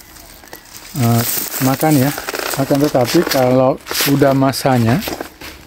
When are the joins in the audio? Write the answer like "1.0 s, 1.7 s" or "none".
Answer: 2.5 s